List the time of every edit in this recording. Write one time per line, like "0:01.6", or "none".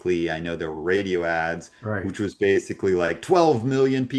none